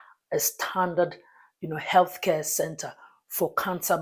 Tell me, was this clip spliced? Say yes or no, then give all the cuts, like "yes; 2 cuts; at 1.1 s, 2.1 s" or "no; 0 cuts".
no; 0 cuts